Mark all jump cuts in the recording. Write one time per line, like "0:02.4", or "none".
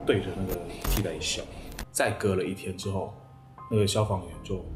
0:01.7